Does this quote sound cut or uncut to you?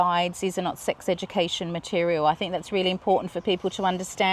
uncut